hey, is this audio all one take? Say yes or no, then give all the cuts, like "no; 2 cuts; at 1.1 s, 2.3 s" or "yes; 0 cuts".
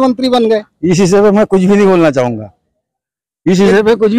yes; 0 cuts